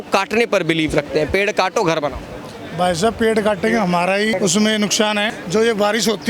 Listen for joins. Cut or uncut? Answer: cut